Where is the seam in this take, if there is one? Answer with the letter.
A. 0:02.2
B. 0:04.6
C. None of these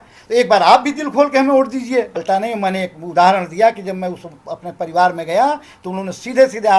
A